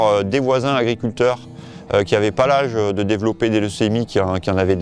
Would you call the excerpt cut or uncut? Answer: uncut